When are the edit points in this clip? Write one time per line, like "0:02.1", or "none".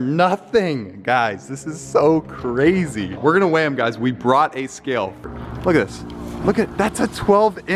none